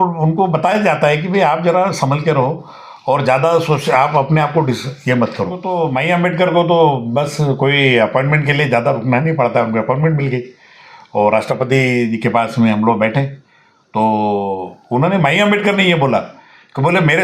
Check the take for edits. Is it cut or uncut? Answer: cut